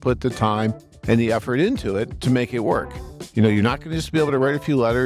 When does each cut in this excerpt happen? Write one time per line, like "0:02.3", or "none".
0:02.1
0:03.2